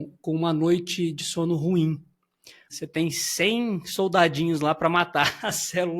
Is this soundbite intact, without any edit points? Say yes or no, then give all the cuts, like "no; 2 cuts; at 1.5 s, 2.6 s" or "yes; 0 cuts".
no; 1 cut; at 2.7 s